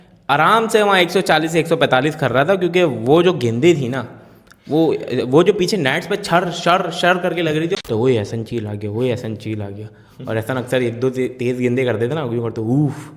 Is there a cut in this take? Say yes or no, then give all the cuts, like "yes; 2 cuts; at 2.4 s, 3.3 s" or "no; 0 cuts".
yes; 1 cut; at 7.8 s